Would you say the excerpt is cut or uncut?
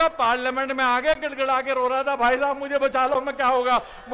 uncut